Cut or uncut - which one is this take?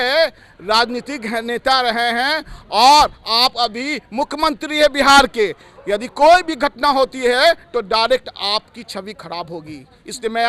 uncut